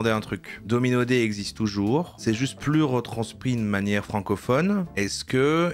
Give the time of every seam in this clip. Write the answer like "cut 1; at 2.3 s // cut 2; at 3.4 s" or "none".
none